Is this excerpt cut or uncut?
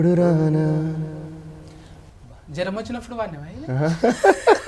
uncut